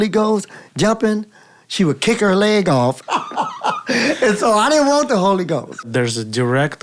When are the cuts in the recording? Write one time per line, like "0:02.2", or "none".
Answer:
0:03.0
0:05.9

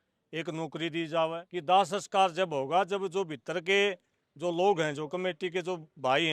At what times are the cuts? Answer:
0:01.4

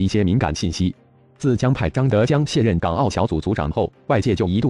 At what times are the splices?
none

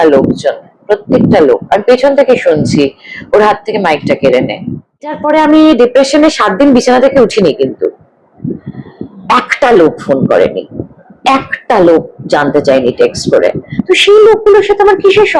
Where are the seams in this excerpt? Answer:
0:05.2

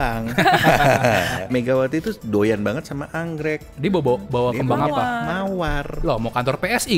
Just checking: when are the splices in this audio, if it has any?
0:01.4

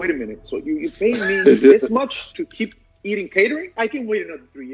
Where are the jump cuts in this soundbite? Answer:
0:02.3
0:03.7

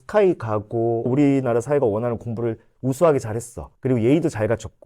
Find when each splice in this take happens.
0:01.0

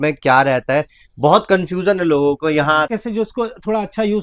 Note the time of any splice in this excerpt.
0:02.9

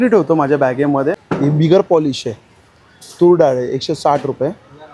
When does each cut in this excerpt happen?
0:01.2

